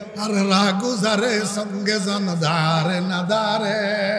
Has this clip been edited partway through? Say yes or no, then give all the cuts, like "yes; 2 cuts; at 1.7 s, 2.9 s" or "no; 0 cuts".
no; 0 cuts